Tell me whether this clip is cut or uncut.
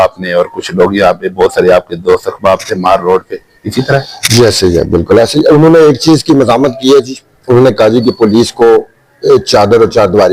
uncut